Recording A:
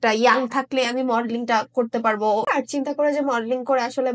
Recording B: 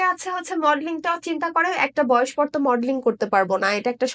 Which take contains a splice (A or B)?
A